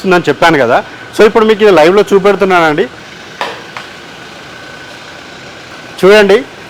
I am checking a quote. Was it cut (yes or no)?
yes